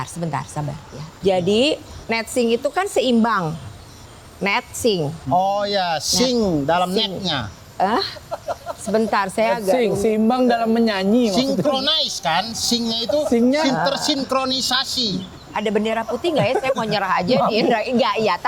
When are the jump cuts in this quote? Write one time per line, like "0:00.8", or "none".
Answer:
0:01.1